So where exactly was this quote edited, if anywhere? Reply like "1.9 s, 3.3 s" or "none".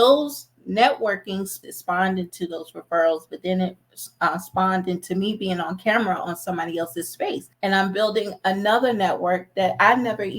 1.5 s, 7.5 s